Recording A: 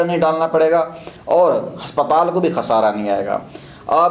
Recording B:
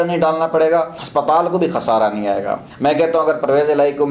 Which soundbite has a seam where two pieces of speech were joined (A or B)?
B